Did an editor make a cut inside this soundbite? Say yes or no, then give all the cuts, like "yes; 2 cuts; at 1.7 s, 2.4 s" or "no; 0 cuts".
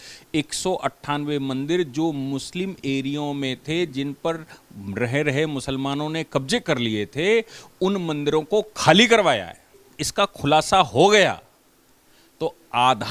yes; 1 cut; at 9.8 s